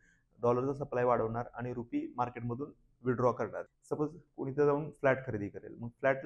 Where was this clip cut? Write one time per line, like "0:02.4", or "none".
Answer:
0:03.6